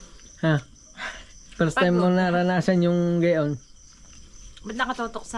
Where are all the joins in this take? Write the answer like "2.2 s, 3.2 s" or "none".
none